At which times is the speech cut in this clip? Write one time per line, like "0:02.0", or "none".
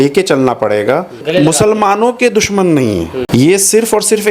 0:01.2
0:03.2